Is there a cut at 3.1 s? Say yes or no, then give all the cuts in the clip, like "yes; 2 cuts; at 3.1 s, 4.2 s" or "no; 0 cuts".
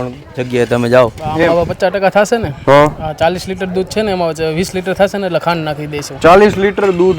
no; 1 cut; at 1.5 s